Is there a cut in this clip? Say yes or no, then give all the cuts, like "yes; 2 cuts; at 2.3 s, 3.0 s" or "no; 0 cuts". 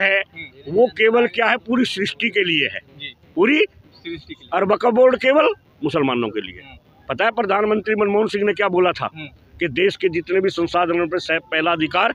no; 0 cuts